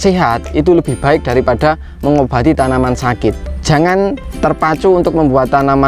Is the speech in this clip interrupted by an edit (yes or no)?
no